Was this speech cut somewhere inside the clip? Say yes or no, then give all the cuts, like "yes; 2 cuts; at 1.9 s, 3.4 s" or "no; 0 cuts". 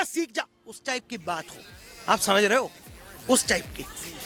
no; 0 cuts